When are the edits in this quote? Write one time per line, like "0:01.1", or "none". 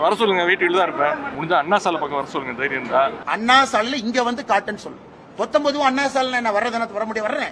0:01.3
0:03.2